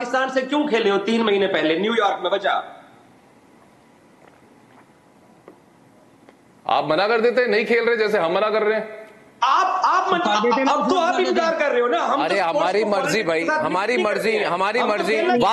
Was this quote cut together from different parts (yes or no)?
no